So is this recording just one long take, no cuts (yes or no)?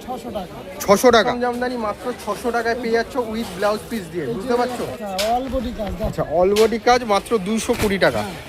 no